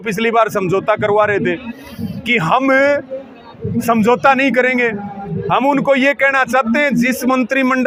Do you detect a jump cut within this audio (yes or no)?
no